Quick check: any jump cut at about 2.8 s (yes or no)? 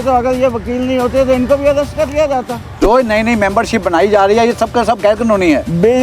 yes